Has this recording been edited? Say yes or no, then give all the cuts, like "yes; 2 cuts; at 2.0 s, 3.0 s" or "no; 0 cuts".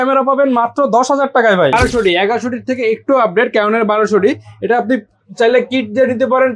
yes; 1 cut; at 1.8 s